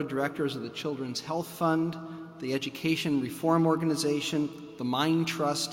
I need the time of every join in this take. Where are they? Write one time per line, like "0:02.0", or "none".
0:03.7